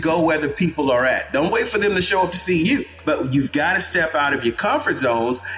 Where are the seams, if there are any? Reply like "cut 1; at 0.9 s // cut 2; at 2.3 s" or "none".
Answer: cut 1; at 2.9 s

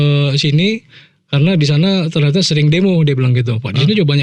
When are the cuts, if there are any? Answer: none

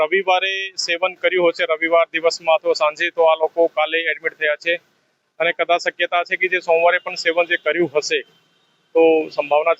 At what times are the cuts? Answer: none

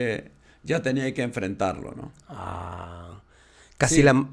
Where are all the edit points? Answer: none

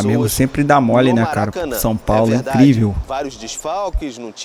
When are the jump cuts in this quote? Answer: none

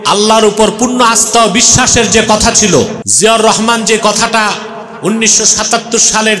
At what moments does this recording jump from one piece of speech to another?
cut 1; at 3.0 s

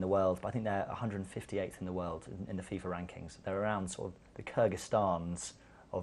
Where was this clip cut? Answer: cut 1; at 2.9 s

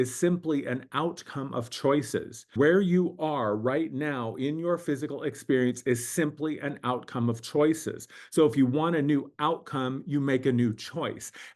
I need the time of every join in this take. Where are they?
cut 1; at 2.4 s

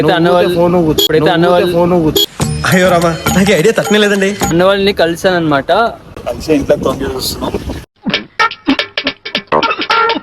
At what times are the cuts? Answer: cut 1; at 4.4 s // cut 2; at 6.1 s

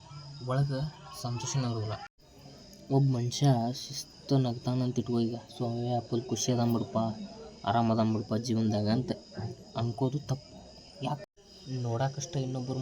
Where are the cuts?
cut 1; at 2.2 s // cut 2; at 11.2 s

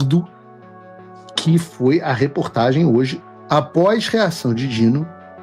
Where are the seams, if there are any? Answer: cut 1; at 3.2 s

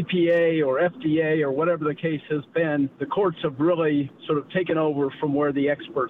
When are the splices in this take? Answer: cut 1; at 3.0 s

